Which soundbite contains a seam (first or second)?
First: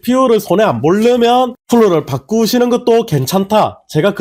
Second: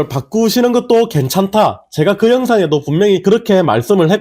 second